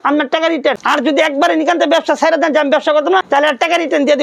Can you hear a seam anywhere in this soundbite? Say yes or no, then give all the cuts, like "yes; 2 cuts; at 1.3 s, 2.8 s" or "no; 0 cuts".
yes; 2 cuts; at 0.8 s, 3.2 s